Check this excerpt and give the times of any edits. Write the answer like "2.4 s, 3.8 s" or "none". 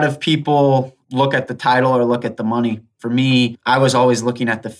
1.0 s, 3.1 s